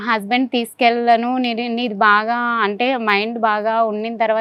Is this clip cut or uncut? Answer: uncut